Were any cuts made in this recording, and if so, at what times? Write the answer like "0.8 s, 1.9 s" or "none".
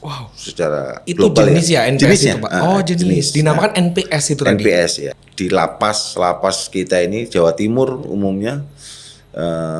5.1 s